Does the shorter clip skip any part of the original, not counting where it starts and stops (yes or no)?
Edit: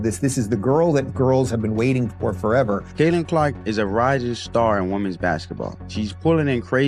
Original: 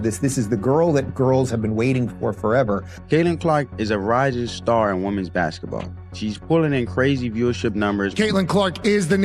yes